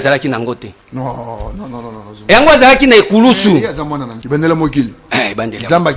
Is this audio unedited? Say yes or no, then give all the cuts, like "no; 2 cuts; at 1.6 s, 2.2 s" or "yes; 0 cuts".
no; 1 cut; at 4.1 s